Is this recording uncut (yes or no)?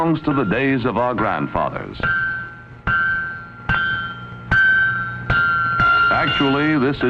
yes